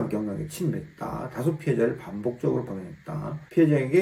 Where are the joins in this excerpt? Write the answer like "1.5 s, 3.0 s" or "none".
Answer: none